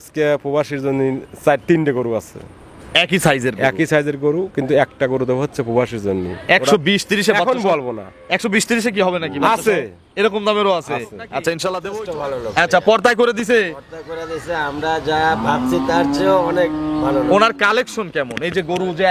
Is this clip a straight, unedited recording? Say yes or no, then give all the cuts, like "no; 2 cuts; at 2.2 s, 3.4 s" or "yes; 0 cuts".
no; 1 cut; at 11.9 s